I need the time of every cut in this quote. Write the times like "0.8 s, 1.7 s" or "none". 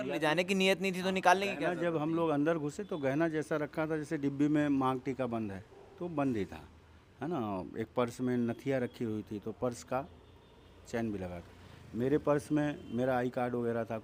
none